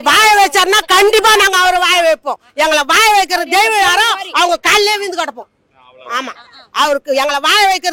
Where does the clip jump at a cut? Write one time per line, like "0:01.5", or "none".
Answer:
none

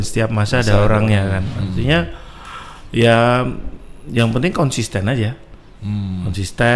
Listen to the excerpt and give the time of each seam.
none

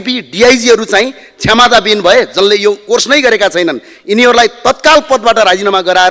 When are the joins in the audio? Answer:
none

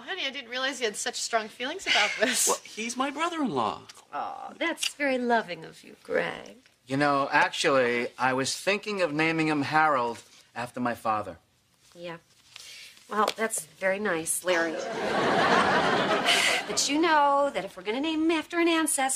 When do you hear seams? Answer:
0:17.1

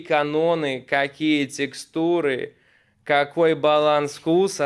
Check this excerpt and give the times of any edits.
none

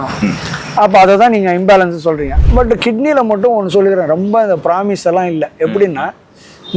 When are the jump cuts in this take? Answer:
0:02.3

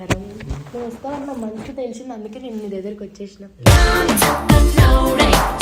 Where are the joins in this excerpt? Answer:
none

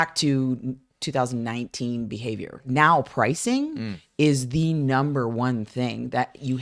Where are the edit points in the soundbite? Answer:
0:02.7

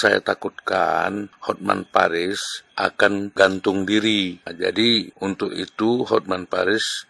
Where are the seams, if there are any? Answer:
0:01.3
0:02.9
0:04.5
0:05.1

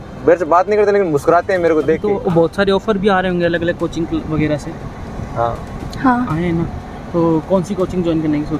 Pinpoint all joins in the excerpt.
0:02.1

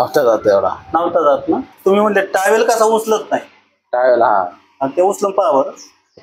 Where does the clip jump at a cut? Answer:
0:01.7

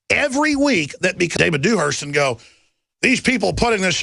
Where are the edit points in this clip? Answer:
none

